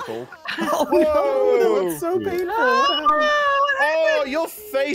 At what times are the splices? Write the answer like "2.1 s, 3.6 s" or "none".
none